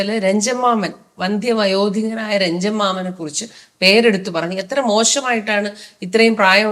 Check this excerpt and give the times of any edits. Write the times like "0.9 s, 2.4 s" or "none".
none